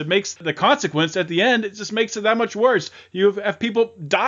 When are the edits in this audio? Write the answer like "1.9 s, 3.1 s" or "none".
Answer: none